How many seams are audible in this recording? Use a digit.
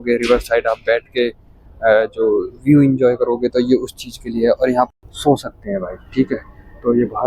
1